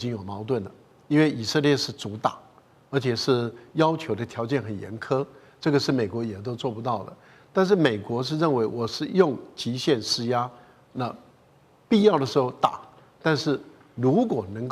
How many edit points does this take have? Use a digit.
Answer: 0